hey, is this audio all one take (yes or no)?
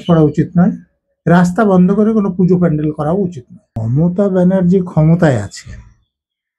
no